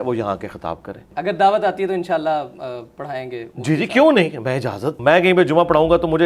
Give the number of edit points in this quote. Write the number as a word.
two